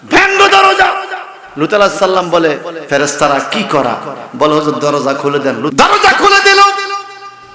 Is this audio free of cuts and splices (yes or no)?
no